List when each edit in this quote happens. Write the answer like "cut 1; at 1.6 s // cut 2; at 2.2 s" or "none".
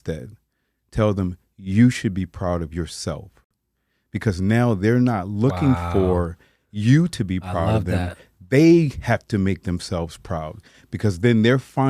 none